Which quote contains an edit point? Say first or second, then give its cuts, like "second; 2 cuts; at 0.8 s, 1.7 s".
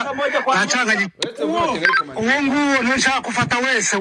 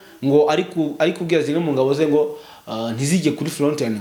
first; 1 cut; at 1.0 s